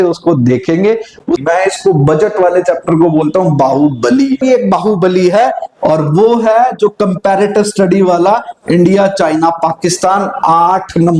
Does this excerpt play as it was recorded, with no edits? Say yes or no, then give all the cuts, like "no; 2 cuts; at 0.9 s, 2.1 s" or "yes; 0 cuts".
no; 2 cuts; at 1.4 s, 4.4 s